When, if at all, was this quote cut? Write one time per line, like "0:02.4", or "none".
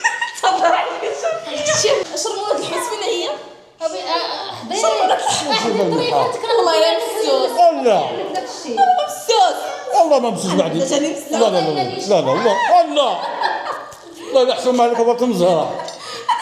0:02.1